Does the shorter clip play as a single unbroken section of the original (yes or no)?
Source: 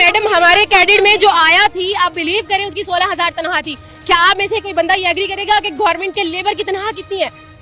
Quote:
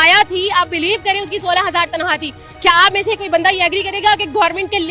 yes